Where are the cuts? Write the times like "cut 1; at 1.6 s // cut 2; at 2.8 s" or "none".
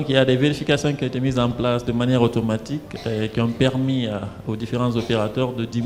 none